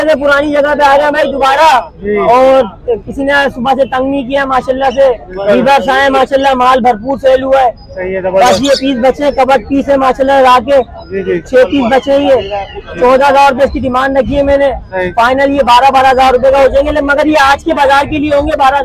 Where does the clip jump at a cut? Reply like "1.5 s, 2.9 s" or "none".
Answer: none